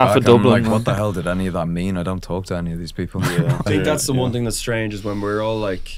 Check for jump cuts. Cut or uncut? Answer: cut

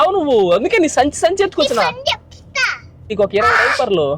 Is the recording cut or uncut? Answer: cut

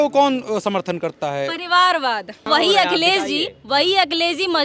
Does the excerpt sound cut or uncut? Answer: cut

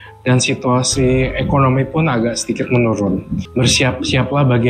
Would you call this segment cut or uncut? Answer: cut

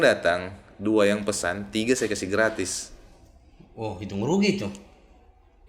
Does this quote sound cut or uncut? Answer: uncut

